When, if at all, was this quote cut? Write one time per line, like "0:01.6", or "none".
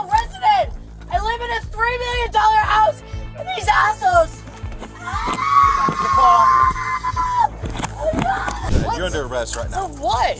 0:08.7